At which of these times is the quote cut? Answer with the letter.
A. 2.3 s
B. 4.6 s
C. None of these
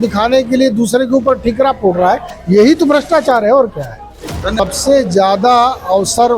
B